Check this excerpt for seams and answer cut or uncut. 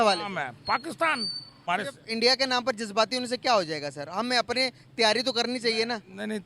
cut